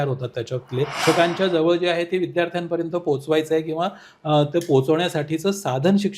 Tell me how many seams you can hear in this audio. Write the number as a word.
one